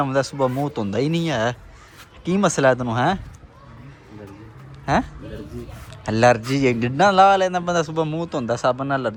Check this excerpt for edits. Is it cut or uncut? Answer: uncut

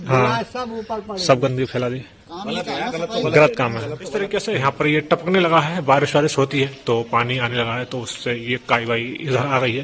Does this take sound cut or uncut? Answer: cut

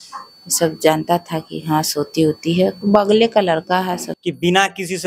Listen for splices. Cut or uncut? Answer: cut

